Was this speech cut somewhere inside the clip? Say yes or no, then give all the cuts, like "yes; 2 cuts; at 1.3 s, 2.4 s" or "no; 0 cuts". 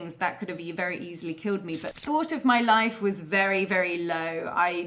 yes; 1 cut; at 1.9 s